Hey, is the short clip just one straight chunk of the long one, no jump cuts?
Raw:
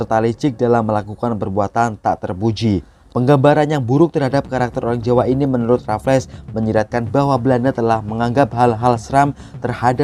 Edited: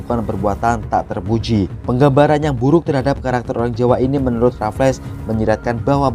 no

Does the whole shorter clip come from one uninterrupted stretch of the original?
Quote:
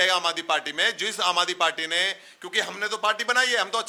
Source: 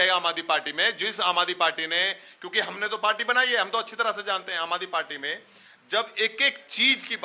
yes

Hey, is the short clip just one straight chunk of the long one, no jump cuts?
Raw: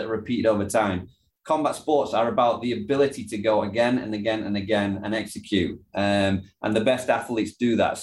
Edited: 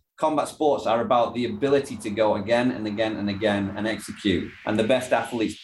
no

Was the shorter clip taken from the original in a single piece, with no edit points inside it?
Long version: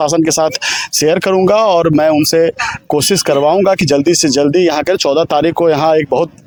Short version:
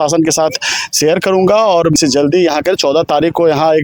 no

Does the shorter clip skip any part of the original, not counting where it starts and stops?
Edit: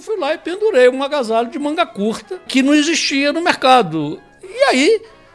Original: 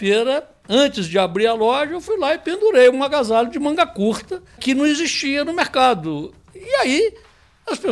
yes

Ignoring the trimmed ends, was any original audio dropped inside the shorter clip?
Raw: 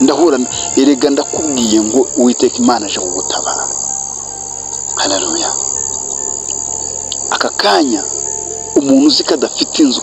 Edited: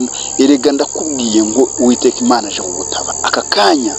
yes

